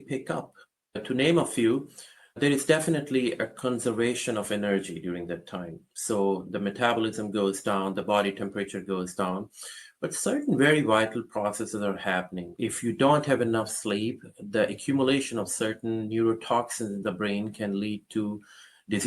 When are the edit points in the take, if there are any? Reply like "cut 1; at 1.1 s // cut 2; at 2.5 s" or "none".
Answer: cut 1; at 12.5 s